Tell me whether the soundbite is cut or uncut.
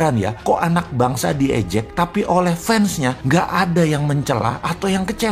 uncut